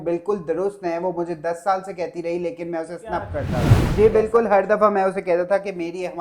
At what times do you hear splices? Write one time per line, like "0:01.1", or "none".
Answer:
0:03.4